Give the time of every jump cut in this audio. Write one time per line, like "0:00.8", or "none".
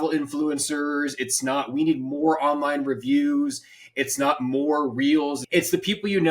0:05.4